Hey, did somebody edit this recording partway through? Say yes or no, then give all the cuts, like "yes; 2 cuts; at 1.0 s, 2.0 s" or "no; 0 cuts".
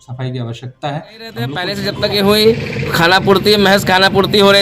yes; 1 cut; at 1.7 s